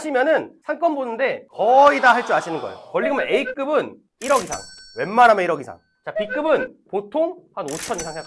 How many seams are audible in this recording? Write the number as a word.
one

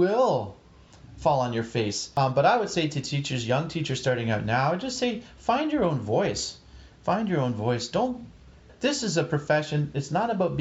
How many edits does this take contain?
two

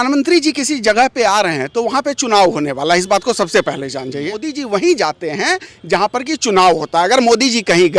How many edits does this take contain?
one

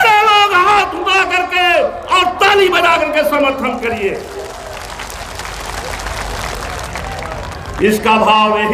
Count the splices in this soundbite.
zero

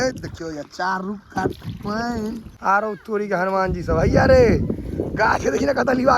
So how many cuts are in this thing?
one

